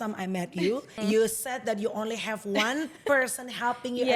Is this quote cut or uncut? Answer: cut